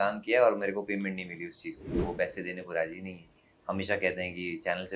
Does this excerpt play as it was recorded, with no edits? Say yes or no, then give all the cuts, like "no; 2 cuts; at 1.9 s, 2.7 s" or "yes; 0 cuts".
no; 1 cut; at 2.0 s